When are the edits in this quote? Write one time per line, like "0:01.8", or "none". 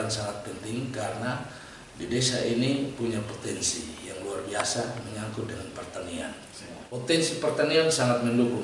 0:06.8